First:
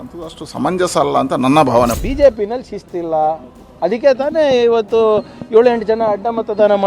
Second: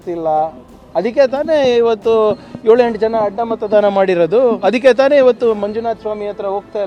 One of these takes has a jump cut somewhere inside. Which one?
first; 1 cut; at 2.0 s

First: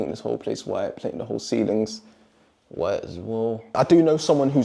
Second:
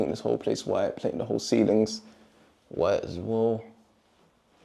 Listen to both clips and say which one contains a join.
first; 1 cut; at 3.6 s

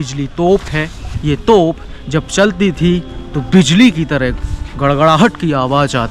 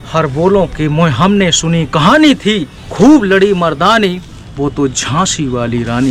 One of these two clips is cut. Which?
first; 1 cut; at 1.1 s

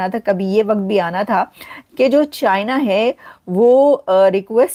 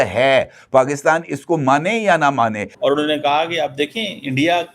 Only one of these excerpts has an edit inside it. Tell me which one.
second; 1 cut; at 2.7 s

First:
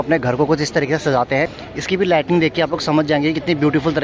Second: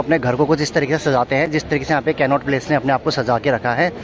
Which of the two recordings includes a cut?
first; 1 cut; at 1.5 s

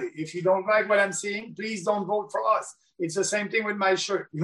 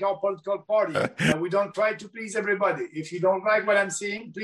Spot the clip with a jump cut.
second; 1 cut; at 1.3 s

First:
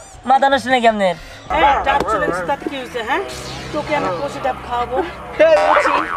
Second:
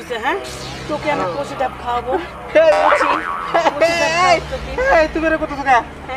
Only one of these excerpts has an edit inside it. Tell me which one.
first; 1 cut; at 1.5 s

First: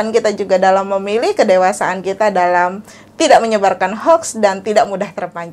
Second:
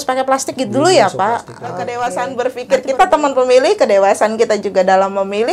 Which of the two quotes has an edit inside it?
second; 1 cut; at 1.9 s

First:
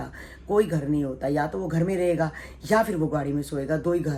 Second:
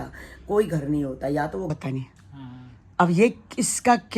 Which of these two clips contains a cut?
second; 1 cut; at 1.7 s

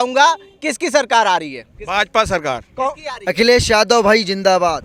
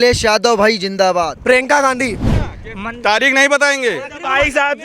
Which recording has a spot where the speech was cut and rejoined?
second; 1 cut; at 2.3 s

